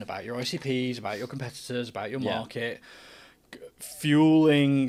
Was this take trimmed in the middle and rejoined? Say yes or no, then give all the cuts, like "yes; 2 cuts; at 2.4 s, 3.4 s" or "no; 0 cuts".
no; 0 cuts